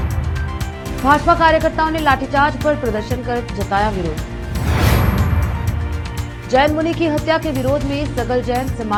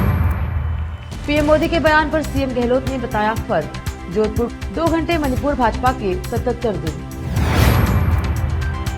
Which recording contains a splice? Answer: second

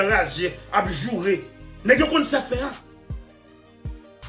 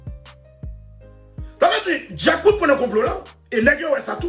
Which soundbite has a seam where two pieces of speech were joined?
first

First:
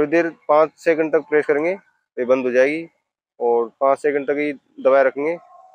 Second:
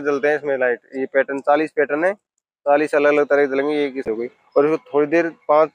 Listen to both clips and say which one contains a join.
second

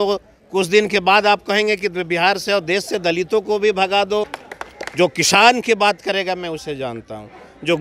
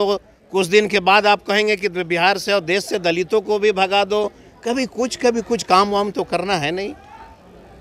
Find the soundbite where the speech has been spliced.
first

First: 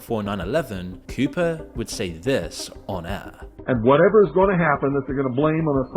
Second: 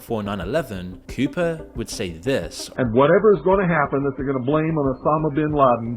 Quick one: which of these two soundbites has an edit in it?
second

